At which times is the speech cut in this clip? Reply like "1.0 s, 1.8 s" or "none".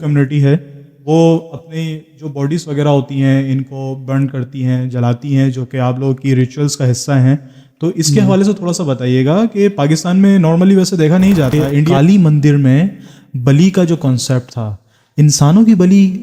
11.9 s